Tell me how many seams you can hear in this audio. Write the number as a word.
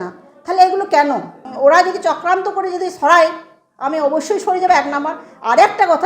one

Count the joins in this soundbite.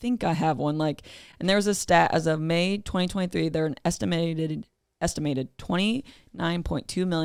zero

